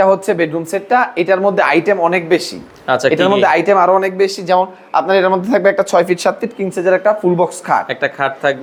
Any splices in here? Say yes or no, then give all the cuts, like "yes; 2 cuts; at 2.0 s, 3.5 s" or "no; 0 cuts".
no; 0 cuts